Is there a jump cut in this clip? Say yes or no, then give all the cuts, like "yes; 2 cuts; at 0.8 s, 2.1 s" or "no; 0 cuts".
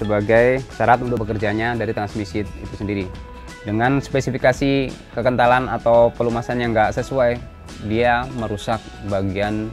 yes; 2 cuts; at 1.2 s, 3.2 s